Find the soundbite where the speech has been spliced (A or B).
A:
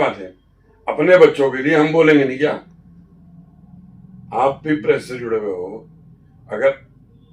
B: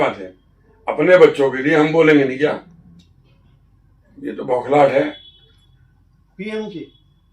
B